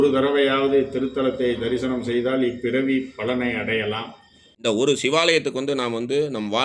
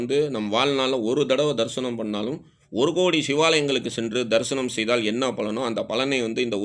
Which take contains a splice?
first; 1 cut; at 4.5 s

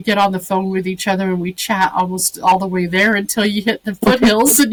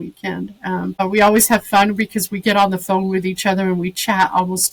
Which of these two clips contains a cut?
second; 1 cut; at 1.0 s

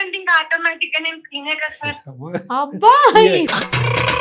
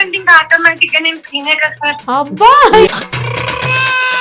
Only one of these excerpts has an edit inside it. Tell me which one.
second; 2 cuts; at 2.0 s, 2.9 s

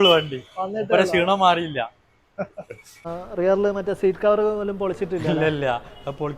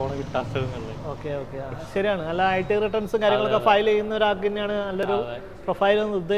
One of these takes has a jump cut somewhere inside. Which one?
first; 1 cut; at 3.0 s

